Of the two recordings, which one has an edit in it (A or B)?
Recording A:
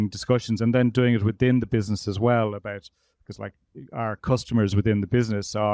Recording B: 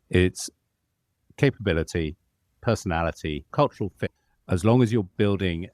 B